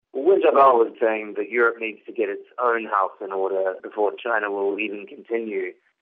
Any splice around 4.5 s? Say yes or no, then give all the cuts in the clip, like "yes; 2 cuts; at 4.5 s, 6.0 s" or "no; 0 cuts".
no; 1 cut; at 0.9 s